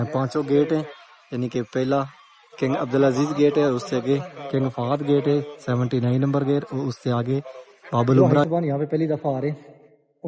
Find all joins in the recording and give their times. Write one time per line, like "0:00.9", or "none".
0:08.4